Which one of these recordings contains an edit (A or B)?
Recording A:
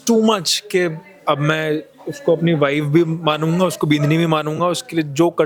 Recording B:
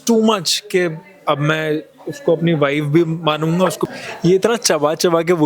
B